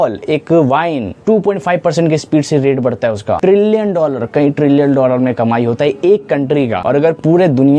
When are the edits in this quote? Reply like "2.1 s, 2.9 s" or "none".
1.1 s, 3.4 s, 6.8 s